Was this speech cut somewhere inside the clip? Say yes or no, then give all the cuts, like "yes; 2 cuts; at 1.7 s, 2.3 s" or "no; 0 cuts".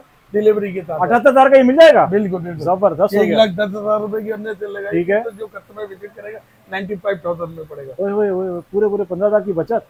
no; 0 cuts